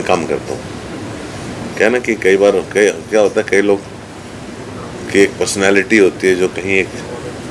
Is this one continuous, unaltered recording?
yes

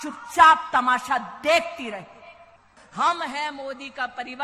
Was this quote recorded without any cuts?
no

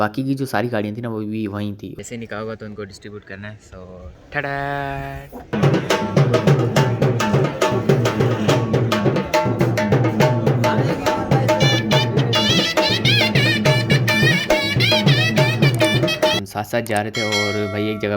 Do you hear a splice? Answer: yes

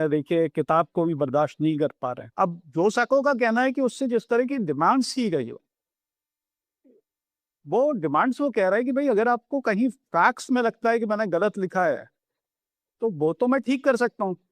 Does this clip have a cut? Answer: yes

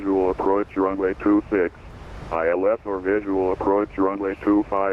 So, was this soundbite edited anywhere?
no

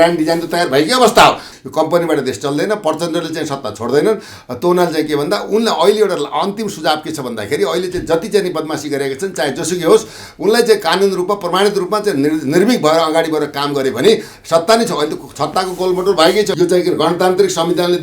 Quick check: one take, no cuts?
no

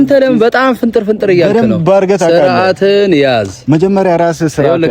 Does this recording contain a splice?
no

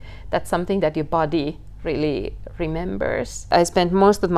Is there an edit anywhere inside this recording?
yes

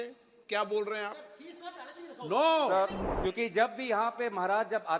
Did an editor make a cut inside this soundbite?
yes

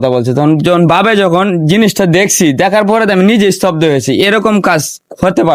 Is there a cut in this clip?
no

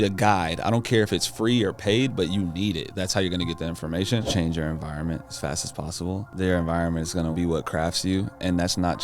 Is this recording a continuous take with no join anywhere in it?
no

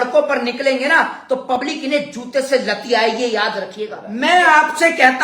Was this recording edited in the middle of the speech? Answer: yes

